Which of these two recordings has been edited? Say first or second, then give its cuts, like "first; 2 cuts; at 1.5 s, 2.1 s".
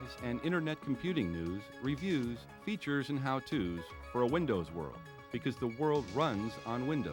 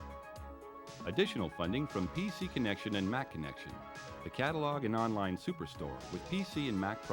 second; 1 cut; at 1.0 s